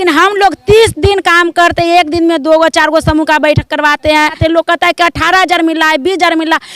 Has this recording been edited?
yes; 1 cut; at 4.4 s

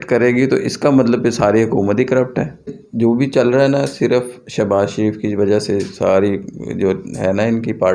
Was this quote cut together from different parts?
yes; 1 cut; at 2.8 s

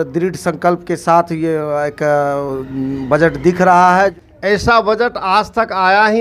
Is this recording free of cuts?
no; 1 cut; at 4.2 s

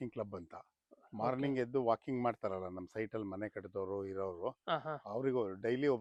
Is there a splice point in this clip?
no; 0 cuts

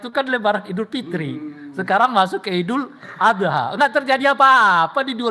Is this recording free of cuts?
yes; 0 cuts

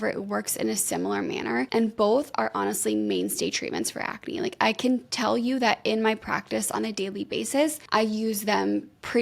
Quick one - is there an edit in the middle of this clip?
yes; 3 cuts; at 1.7 s, 5.1 s, 7.8 s

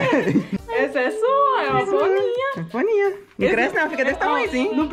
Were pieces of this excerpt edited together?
no; 0 cuts

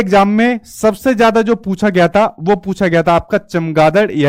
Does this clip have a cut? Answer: no; 0 cuts

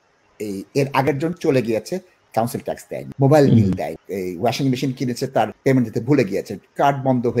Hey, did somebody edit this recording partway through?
yes; 3 cuts; at 2.5 s, 4.0 s, 5.5 s

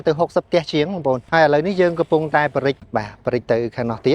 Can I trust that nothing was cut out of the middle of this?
no; 2 cuts; at 1.2 s, 2.8 s

